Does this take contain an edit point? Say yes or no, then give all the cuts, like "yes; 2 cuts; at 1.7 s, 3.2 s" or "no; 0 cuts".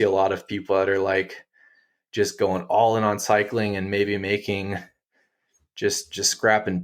no; 0 cuts